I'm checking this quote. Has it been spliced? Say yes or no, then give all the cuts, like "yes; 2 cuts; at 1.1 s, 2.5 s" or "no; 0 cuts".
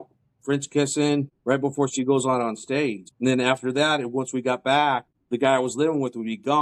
yes; 3 cuts; at 1.3 s, 3.1 s, 5.1 s